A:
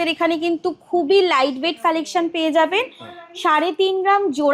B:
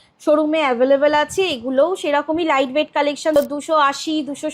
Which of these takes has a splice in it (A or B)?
B